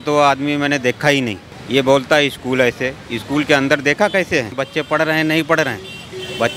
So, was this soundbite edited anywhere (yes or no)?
yes